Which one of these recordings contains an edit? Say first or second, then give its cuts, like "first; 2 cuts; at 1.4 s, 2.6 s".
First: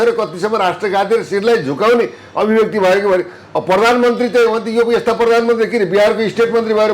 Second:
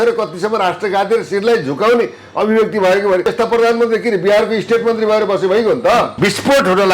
second; 2 cuts; at 3.3 s, 6.1 s